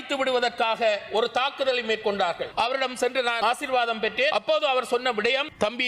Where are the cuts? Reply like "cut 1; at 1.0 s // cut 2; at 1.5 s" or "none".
cut 1; at 2.5 s // cut 2; at 3.4 s // cut 3; at 4.3 s